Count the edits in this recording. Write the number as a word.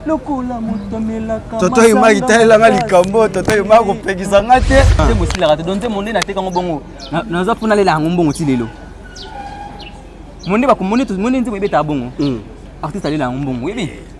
one